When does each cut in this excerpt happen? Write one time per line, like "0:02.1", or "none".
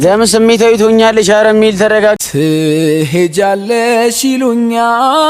0:02.2